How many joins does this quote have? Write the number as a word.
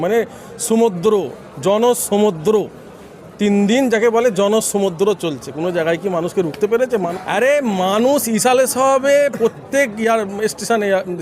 one